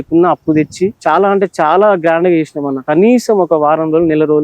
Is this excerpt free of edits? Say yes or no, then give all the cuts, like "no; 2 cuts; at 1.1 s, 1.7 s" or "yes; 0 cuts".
no; 2 cuts; at 1.0 s, 2.9 s